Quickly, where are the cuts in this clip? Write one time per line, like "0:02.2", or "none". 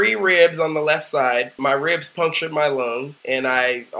0:01.5
0:03.1